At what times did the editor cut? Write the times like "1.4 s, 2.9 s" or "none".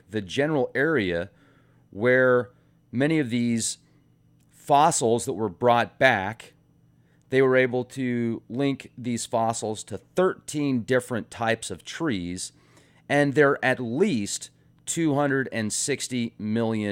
none